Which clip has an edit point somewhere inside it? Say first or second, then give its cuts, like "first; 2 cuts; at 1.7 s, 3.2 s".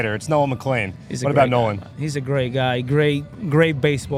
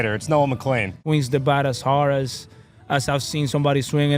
second; 1 cut; at 0.9 s